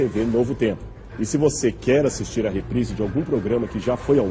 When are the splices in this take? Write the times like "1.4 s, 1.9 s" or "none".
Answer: none